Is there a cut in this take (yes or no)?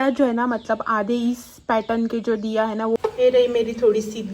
yes